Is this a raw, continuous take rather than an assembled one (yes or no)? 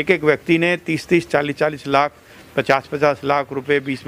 yes